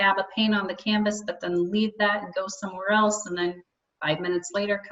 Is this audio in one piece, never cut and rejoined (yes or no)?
yes